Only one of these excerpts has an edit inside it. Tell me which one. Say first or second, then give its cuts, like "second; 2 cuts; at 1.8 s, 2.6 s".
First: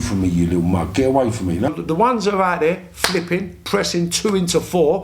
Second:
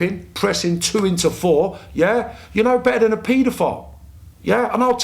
first; 1 cut; at 1.7 s